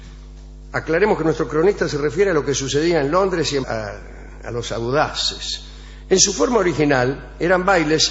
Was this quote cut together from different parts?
no; 0 cuts

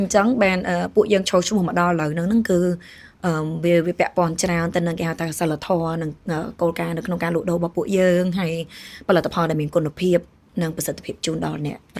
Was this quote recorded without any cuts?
yes; 0 cuts

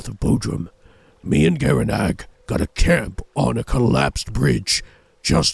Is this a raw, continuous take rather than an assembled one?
yes; 0 cuts

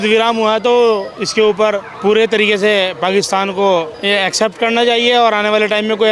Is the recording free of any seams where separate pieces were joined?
yes; 0 cuts

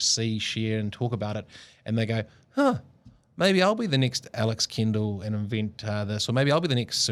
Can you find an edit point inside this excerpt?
no; 0 cuts

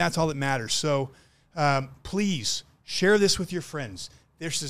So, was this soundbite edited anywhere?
no; 0 cuts

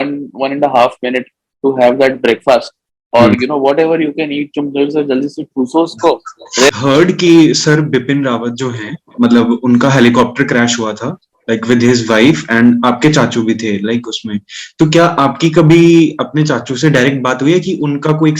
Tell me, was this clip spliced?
yes; 1 cut; at 6.7 s

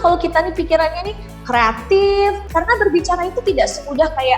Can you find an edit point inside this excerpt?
yes; 1 cut; at 2.4 s

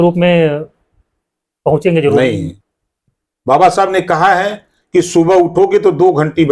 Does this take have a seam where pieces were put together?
yes; 1 cut; at 2.5 s

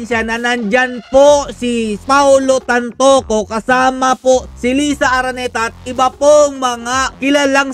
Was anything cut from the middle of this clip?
yes; 1 cut; at 2.0 s

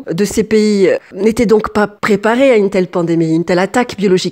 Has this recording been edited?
no; 0 cuts

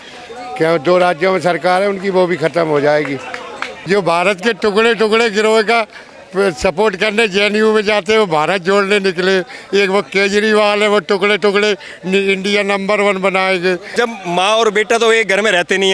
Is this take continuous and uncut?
no; 2 cuts; at 3.7 s, 13.9 s

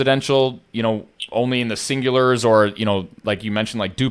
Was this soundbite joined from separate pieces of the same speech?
no; 0 cuts

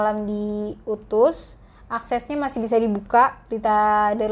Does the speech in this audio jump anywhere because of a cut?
no; 0 cuts

